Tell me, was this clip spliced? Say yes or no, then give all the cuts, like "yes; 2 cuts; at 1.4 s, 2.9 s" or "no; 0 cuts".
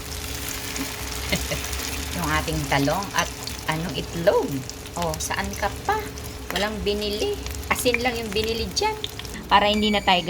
yes; 5 cuts; at 2.0 s, 3.9 s, 6.3 s, 7.5 s, 9.3 s